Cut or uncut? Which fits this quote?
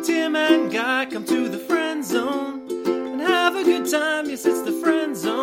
uncut